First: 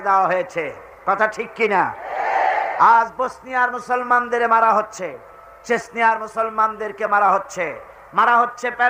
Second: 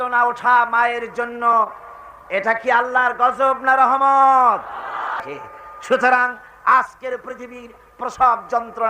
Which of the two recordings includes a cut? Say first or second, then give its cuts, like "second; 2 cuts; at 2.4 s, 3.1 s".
second; 1 cut; at 5.2 s